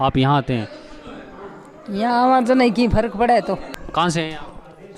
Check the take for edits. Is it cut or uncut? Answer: uncut